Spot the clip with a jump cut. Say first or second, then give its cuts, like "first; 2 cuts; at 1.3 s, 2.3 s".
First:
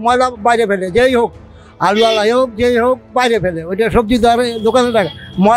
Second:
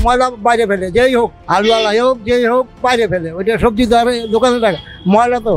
second; 1 cut; at 1.4 s